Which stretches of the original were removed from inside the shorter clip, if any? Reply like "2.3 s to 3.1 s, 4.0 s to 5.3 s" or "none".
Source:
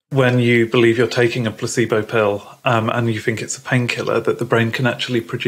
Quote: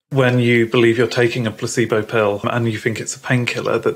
2.4 s to 2.8 s